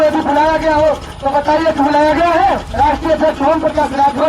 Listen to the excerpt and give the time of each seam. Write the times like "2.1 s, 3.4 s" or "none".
2.7 s